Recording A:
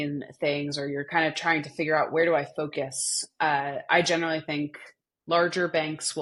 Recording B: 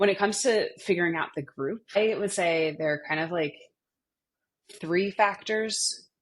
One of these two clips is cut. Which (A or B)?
B